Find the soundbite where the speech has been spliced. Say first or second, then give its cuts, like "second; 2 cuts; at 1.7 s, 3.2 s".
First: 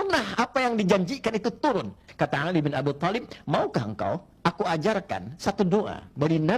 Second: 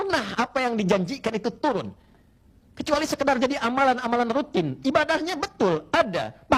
first; 1 cut; at 2.1 s